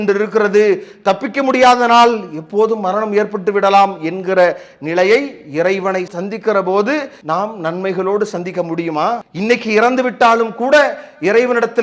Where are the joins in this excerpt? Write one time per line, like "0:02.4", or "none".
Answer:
0:07.2
0:09.3